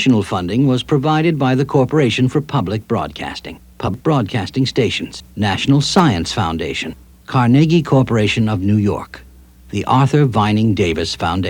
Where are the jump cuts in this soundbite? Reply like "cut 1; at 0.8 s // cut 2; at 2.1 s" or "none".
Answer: cut 1; at 2.2 s // cut 2; at 3.9 s